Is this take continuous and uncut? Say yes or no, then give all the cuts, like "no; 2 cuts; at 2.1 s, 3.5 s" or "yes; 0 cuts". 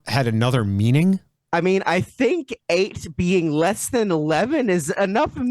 no; 1 cut; at 1.3 s